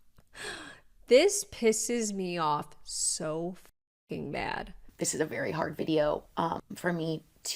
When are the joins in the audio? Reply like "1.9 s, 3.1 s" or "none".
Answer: 4.8 s